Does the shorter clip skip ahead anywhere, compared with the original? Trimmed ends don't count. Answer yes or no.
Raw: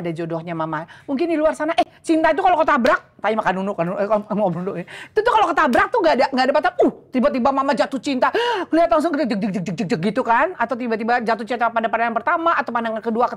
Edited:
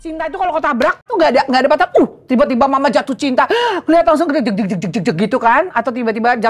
yes